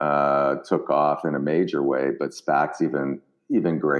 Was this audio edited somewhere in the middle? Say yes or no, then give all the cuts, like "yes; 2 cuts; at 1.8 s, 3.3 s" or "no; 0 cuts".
no; 0 cuts